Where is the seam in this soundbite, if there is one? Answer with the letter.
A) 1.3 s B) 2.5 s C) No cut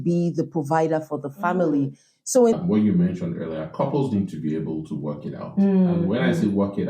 B